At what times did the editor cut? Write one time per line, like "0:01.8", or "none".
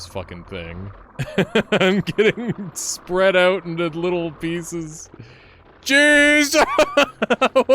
0:01.0